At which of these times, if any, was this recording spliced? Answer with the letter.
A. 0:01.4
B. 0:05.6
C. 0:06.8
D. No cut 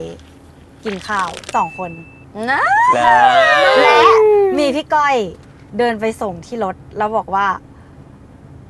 A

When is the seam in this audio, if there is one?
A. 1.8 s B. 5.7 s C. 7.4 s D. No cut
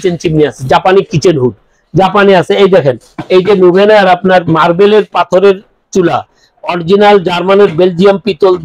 D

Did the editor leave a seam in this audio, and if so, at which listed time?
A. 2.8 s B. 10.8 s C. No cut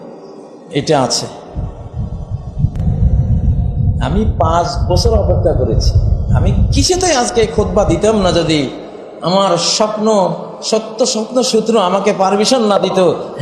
A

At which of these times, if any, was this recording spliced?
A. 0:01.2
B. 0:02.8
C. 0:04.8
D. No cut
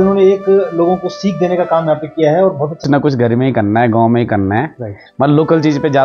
B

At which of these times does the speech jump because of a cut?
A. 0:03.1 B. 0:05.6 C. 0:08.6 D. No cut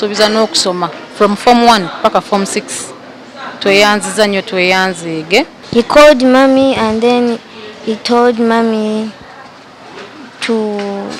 B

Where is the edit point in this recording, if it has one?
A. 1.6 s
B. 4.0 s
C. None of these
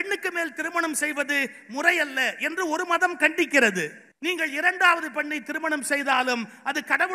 B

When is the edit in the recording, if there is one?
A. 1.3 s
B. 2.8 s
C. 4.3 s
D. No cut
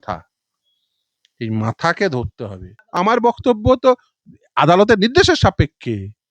B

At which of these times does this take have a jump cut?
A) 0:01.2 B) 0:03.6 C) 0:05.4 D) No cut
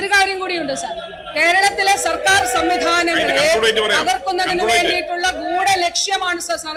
D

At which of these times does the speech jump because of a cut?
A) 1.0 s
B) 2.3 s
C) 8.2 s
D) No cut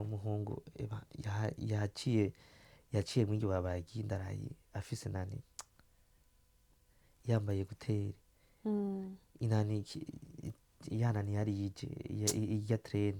D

